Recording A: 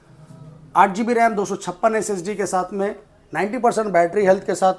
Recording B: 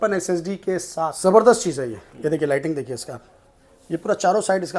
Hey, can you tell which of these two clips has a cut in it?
B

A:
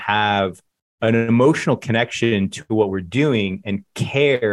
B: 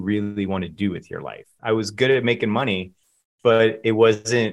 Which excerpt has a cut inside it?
B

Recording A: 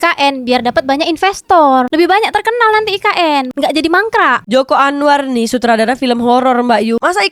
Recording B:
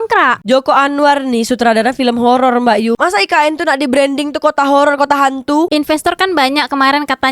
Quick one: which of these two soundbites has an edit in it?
B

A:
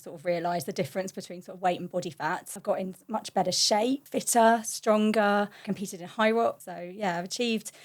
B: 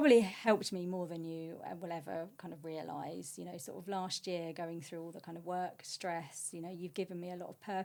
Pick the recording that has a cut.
A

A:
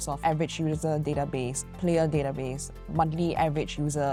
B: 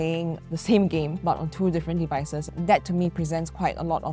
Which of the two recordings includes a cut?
B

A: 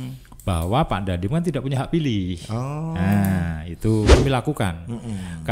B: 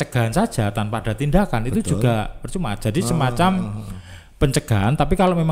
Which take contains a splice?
A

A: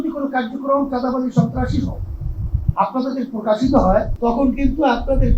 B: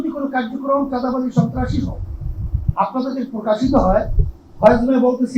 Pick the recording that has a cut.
A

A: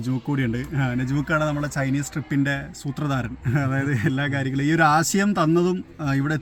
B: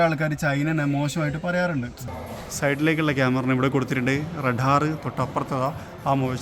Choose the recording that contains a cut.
B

